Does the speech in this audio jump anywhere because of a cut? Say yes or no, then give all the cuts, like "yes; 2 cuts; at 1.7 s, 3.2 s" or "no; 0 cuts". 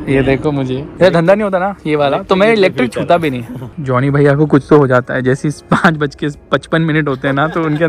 yes; 2 cuts; at 0.9 s, 3.7 s